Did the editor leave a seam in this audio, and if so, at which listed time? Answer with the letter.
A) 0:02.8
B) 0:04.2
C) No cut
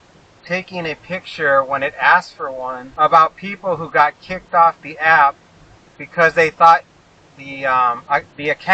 A